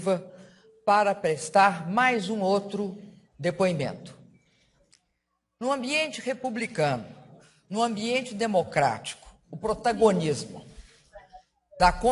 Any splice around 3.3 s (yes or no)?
no